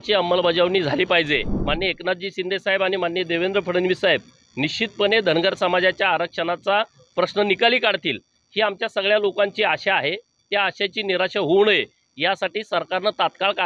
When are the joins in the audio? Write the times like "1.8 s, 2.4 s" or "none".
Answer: 1.6 s